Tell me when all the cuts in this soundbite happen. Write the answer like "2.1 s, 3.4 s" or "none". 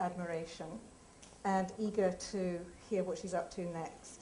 3.3 s